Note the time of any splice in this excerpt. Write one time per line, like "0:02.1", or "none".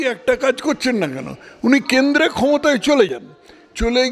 none